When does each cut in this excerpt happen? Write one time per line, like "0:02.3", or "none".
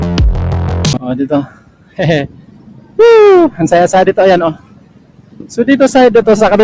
0:00.9